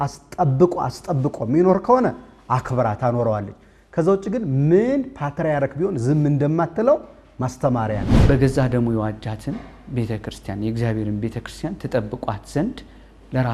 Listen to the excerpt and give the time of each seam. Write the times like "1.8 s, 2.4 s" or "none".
8.1 s

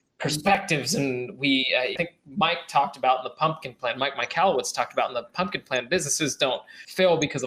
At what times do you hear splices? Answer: none

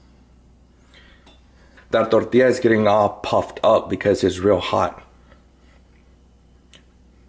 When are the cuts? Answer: 1.8 s

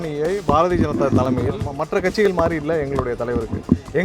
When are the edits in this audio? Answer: 1.7 s

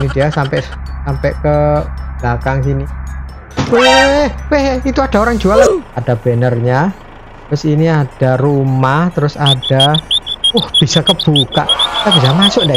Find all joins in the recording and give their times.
5.9 s

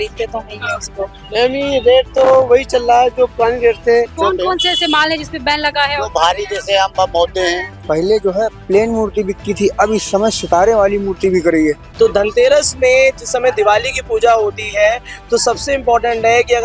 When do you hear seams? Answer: 1.2 s, 4.1 s, 7.7 s, 11.9 s

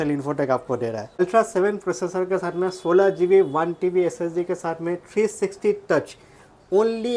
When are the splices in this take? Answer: 1.2 s

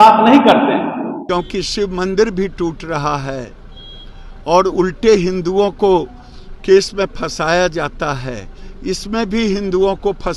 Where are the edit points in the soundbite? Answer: 1.1 s

